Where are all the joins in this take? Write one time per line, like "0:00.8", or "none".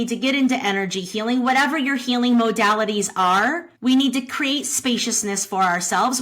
0:03.7